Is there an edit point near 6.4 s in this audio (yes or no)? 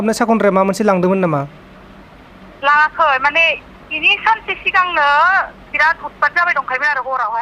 no